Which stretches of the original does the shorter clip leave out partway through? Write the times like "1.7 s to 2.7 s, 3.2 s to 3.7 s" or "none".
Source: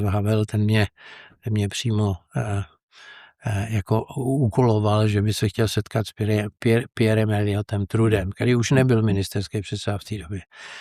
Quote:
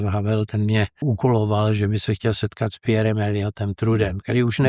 1.0 s to 4.4 s, 6.1 s to 6.9 s